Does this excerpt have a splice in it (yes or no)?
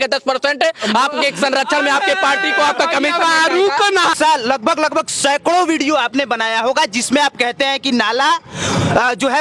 yes